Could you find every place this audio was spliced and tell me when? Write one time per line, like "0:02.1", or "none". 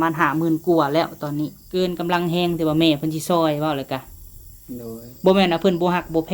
0:01.6